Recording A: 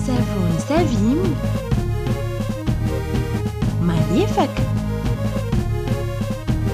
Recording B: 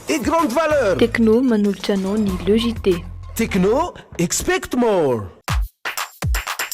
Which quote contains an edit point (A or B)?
B